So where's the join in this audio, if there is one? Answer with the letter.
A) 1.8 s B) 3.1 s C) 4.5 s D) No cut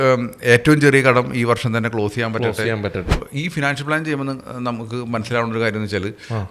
B